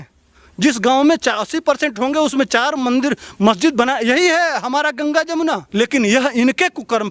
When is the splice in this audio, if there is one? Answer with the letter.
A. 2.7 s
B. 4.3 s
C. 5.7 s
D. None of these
C